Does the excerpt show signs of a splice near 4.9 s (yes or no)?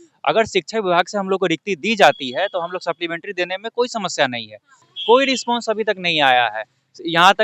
yes